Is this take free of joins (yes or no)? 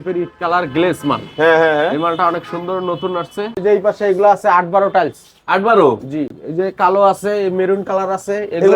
no